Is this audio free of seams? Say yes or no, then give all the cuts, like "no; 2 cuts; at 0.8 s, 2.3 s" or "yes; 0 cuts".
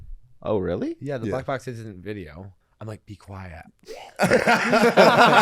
no; 1 cut; at 2.6 s